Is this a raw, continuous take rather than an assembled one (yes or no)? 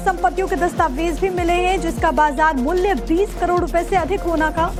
yes